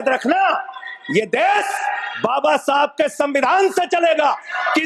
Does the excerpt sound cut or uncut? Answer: uncut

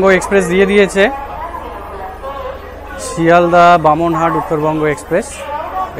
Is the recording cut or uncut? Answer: uncut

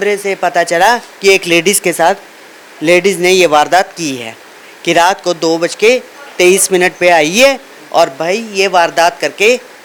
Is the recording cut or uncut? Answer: uncut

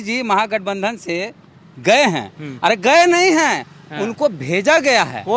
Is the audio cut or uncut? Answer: uncut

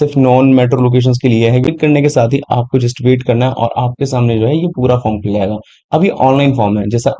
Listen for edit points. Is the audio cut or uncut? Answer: cut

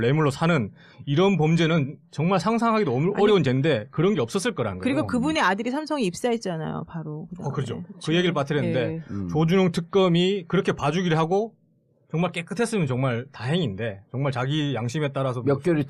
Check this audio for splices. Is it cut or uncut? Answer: uncut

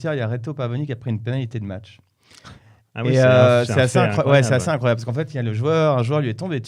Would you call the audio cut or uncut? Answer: uncut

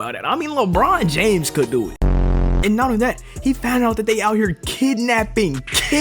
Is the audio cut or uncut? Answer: cut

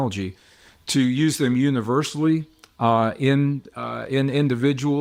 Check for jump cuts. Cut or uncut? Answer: uncut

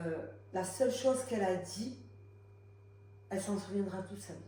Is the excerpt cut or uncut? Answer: uncut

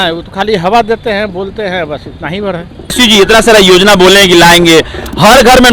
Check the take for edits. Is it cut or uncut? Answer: cut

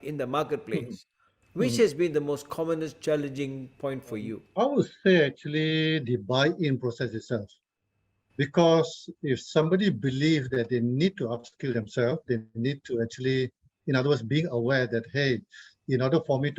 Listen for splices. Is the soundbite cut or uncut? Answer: cut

